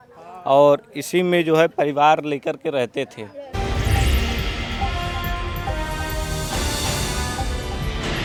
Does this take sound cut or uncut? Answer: uncut